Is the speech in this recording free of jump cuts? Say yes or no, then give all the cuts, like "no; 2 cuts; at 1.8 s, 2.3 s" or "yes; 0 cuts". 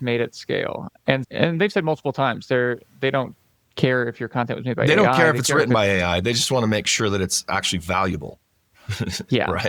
yes; 0 cuts